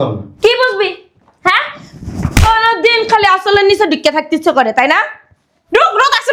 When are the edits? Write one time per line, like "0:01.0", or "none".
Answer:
none